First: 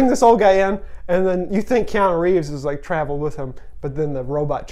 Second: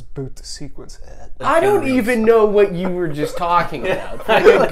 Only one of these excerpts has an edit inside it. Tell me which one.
second; 1 cut; at 1.4 s

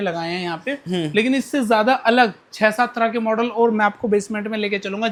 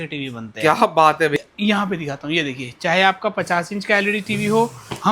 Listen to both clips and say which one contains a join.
second; 1 cut; at 1.4 s

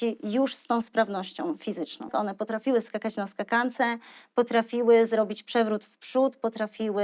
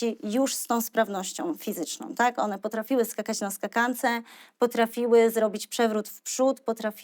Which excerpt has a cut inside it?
first; 1 cut; at 2.1 s

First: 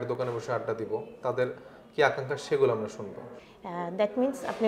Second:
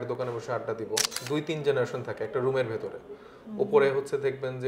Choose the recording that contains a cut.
second; 1 cut; at 1.1 s

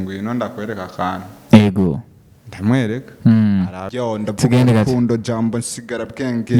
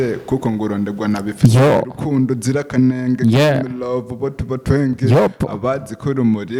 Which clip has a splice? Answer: first; 1 cut; at 3.8 s

